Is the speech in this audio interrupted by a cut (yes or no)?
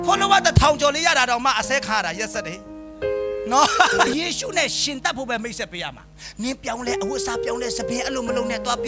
yes